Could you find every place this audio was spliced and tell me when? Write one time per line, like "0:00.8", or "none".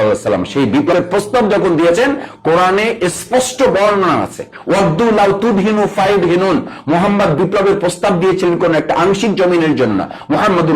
0:00.9

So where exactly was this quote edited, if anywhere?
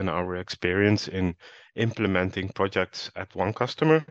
none

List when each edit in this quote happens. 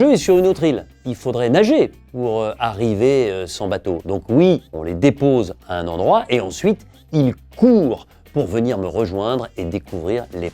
0:01.0
0:04.7

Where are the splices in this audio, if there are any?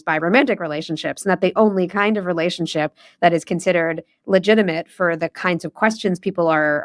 none

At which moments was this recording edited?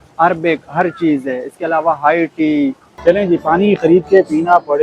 0:02.8

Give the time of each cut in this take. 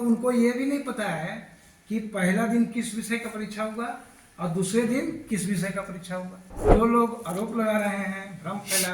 0:06.7

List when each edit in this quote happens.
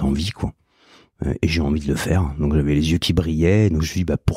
none

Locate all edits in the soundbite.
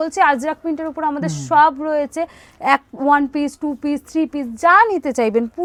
none

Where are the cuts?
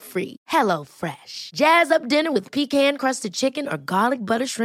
none

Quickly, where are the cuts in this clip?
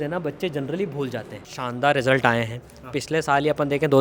0:01.5

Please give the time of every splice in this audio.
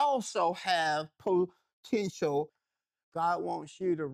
0:02.6

